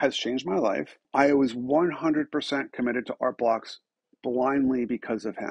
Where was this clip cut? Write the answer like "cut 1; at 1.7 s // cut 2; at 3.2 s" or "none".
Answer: cut 1; at 1.0 s